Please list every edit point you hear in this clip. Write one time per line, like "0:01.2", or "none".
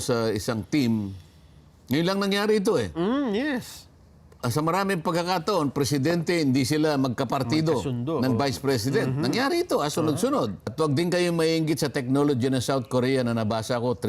0:10.6